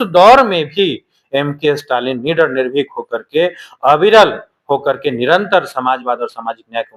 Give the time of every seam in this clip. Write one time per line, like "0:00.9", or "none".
none

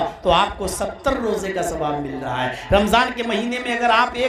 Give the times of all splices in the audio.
none

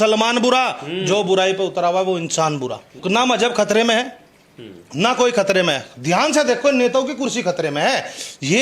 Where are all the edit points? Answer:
none

